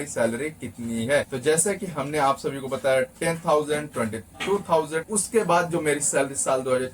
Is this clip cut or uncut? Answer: cut